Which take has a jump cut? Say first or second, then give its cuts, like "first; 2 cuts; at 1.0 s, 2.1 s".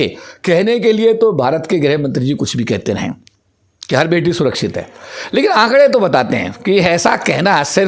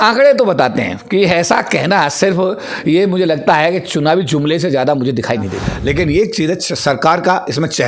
second; 1 cut; at 5.7 s